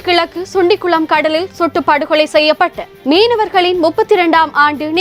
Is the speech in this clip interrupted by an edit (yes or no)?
no